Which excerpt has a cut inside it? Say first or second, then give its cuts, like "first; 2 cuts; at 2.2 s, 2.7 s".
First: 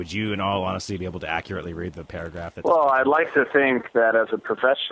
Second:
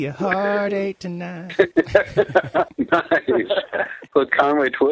second; 2 cuts; at 1.4 s, 2.7 s